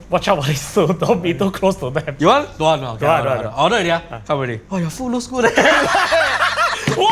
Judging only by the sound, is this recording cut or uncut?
cut